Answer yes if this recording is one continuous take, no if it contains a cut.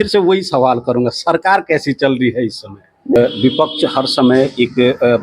no